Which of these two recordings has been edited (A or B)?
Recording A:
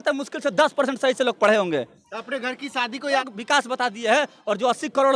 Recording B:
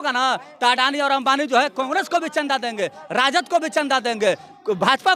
A